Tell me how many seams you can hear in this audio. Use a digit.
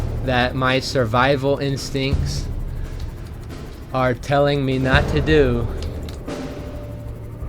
0